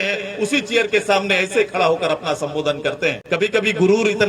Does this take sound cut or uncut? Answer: cut